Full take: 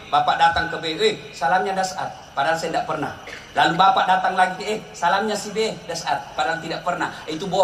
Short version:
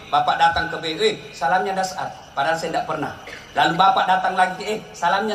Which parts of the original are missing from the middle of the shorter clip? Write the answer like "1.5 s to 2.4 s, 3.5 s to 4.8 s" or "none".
none